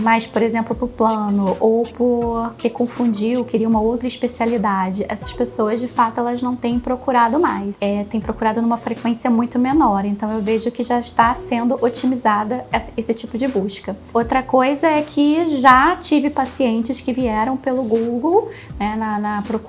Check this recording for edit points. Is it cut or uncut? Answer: uncut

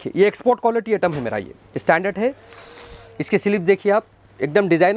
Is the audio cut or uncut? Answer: uncut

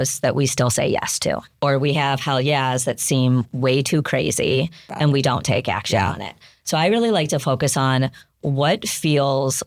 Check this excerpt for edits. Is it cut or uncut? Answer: cut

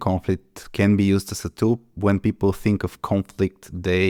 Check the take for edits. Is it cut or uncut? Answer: uncut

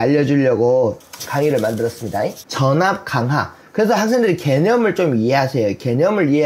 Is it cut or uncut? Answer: cut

